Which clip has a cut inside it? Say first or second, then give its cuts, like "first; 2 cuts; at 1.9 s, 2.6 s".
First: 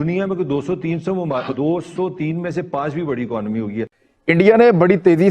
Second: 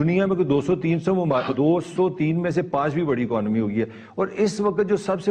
first; 1 cut; at 4.1 s